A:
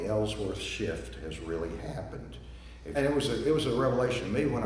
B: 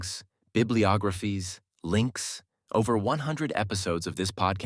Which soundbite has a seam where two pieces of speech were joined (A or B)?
A